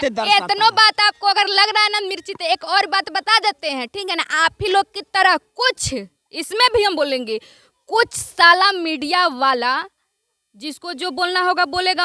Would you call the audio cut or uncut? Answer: uncut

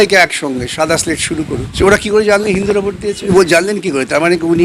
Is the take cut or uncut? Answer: cut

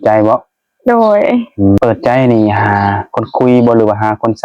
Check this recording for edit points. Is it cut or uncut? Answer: cut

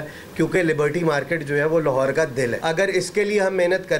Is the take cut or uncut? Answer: cut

